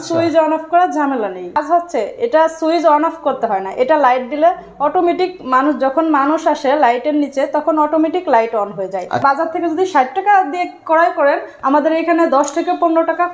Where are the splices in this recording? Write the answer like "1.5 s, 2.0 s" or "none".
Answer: 1.6 s, 9.2 s